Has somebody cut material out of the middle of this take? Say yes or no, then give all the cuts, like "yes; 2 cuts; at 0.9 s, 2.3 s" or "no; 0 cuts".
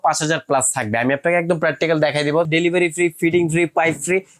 yes; 1 cut; at 2.4 s